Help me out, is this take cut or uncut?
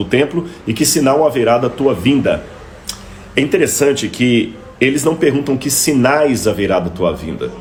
uncut